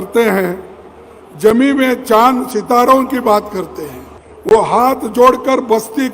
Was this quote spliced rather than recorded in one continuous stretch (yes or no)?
yes